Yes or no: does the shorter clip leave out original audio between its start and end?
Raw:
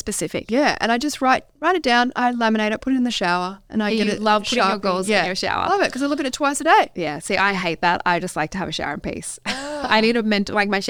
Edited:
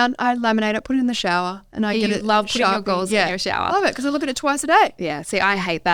no